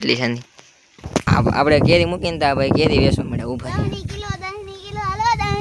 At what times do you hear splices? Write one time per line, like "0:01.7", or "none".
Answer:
0:01.2